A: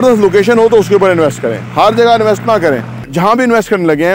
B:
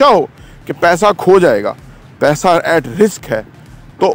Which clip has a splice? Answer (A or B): A